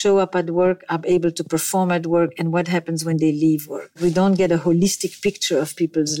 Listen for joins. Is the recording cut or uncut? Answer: cut